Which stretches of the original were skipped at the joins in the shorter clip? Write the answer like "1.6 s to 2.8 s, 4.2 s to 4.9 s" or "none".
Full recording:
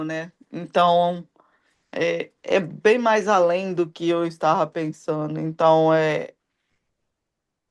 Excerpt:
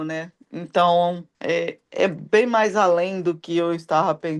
1.3 s to 1.8 s